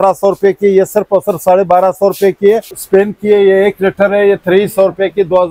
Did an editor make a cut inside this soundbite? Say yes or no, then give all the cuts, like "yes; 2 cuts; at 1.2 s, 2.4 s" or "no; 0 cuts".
yes; 1 cut; at 2.7 s